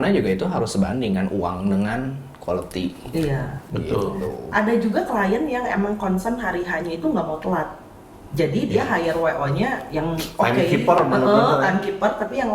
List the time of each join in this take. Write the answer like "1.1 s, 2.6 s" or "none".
none